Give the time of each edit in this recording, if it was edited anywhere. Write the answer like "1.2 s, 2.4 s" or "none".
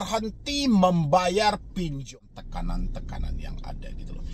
2.0 s